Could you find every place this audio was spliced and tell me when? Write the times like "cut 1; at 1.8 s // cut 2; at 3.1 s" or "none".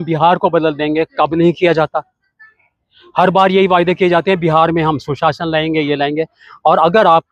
none